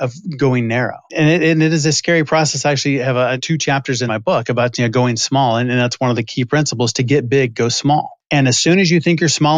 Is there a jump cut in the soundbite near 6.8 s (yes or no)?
no